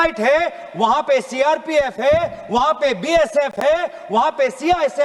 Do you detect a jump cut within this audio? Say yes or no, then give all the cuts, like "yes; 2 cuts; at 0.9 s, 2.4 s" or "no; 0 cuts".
no; 0 cuts